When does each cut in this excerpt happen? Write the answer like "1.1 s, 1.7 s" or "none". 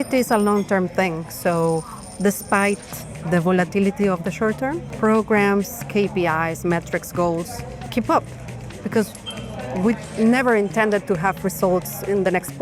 4.9 s, 7.9 s